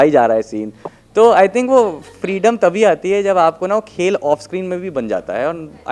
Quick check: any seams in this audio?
no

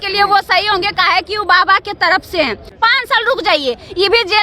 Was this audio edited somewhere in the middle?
yes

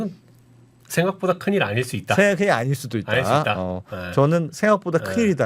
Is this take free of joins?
yes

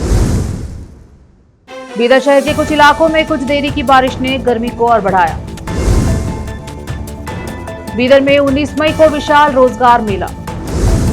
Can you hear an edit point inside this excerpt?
yes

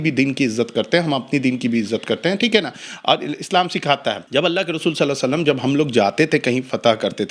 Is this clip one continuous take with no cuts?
no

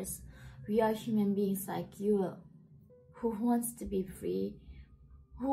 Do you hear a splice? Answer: no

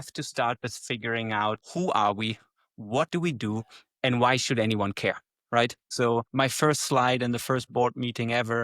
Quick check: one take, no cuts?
no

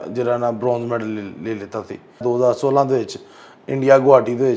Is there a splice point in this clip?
yes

